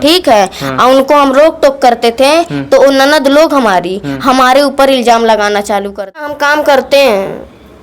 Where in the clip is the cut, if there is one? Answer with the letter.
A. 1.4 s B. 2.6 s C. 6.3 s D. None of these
C